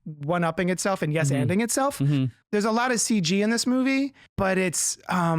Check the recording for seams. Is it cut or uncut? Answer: cut